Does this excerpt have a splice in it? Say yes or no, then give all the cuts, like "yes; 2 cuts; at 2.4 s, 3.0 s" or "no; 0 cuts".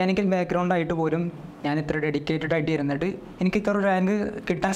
no; 0 cuts